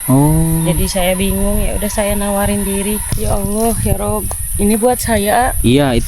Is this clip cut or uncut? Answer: cut